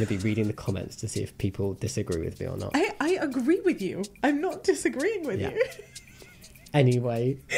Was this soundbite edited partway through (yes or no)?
no